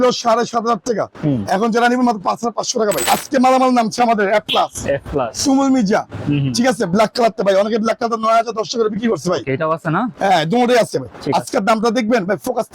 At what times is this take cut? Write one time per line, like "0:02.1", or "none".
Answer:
0:03.1

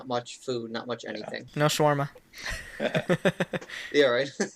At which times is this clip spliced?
0:01.4

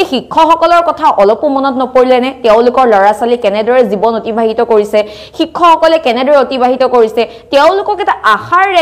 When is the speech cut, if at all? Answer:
none

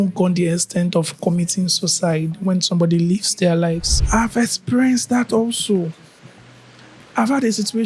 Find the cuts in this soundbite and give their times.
0:03.9

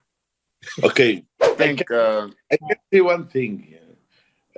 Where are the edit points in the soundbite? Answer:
0:01.5

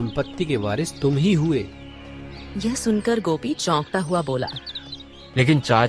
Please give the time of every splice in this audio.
none

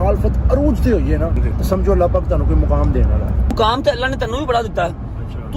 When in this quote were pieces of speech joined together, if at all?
0:01.4
0:03.5

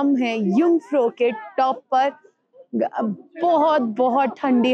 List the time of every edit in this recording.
none

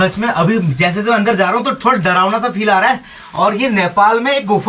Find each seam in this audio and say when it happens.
none

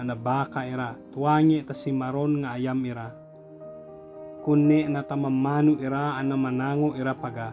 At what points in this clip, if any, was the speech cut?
none

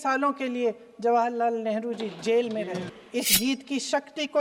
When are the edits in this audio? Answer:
0:02.9

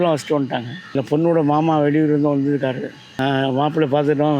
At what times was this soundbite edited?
0:00.9
0:03.0

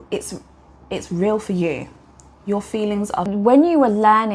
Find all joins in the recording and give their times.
0:03.2

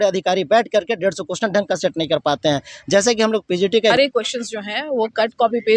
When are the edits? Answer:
0:03.9

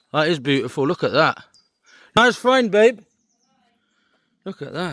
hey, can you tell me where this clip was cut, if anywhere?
0:02.2

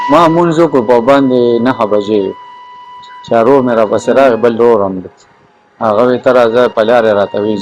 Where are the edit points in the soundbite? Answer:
none

